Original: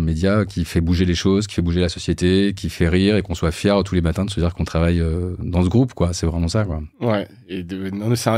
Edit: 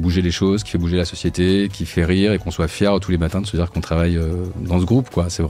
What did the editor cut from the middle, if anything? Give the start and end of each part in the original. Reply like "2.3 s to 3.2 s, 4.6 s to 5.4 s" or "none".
none

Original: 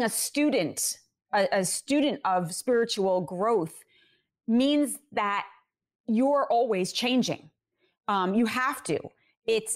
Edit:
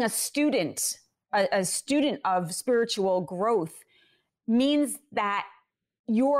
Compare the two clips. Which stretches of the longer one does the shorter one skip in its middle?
none

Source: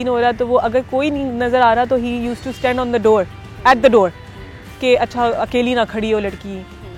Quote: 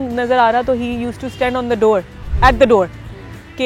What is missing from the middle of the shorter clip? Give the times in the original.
none

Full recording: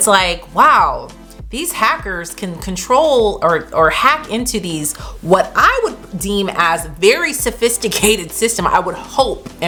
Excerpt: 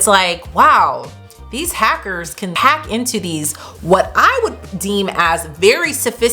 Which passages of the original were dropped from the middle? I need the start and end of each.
2.6 s to 4.0 s

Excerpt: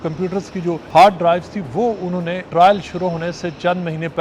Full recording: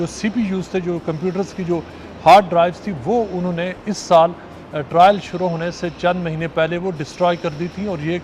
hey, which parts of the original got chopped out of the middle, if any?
1.9 s to 2.1 s, 3.7 s to 4.8 s

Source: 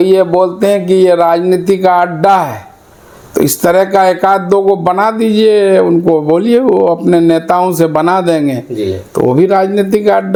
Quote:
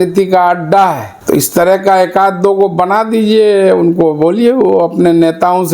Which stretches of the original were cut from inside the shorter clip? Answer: 2.6 s to 3.2 s

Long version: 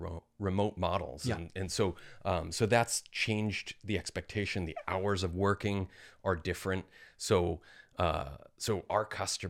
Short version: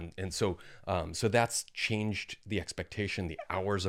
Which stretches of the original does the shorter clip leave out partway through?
none

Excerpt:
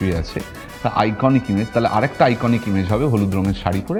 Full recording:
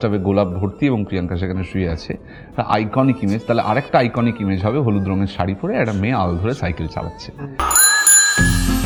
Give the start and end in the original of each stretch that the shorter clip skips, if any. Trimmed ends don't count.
none

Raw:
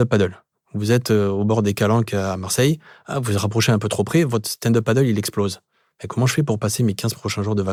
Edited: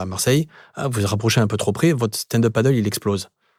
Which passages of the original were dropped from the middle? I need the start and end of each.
none

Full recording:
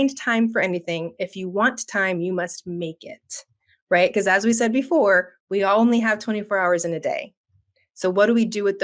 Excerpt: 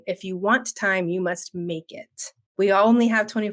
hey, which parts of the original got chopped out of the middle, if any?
3.6 s to 5.4 s

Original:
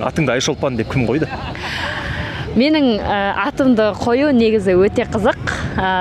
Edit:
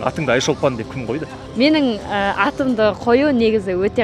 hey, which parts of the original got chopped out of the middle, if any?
1.4 s to 2.4 s

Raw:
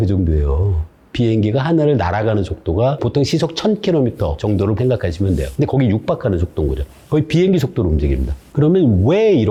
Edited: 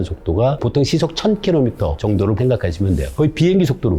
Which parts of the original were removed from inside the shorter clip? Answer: 5.5 s to 7.0 s

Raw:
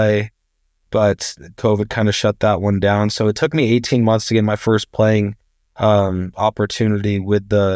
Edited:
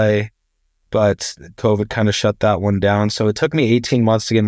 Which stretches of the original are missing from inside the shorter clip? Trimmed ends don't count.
none

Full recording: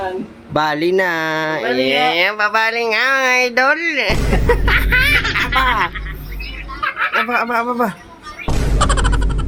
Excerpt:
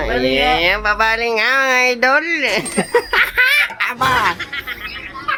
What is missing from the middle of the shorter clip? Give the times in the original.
none

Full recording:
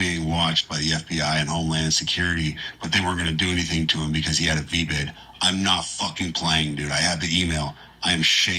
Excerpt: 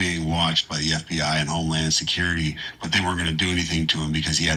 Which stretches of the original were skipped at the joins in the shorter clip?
none

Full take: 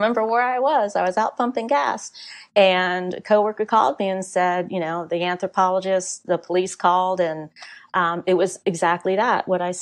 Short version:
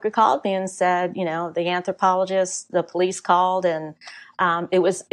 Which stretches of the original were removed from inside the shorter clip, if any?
none

